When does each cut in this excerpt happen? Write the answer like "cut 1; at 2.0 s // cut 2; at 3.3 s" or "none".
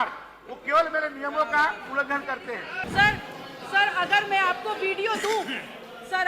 cut 1; at 2.9 s